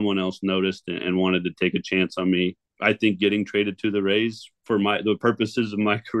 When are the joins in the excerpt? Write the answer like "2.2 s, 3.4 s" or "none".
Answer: 2.7 s